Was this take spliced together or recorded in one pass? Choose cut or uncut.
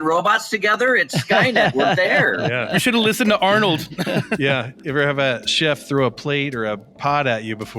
cut